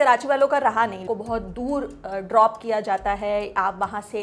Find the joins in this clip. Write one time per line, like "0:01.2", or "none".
0:01.0

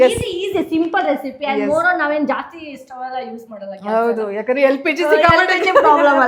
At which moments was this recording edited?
none

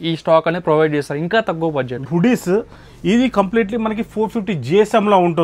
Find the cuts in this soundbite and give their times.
0:02.0

